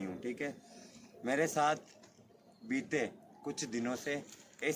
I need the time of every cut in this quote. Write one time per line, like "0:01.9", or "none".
none